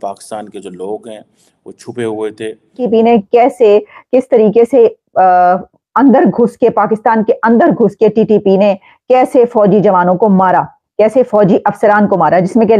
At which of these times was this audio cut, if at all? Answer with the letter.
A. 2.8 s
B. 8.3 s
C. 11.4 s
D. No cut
A